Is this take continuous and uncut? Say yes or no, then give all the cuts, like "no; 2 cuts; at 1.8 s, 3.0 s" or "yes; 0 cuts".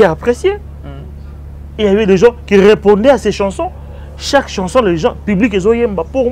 yes; 0 cuts